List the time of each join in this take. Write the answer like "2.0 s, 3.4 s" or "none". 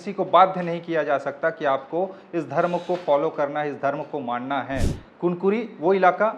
4.9 s